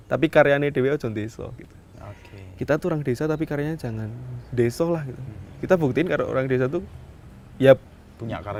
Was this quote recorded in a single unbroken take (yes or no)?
yes